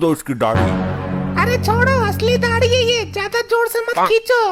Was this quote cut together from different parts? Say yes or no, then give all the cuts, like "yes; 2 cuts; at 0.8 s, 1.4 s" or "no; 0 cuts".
no; 0 cuts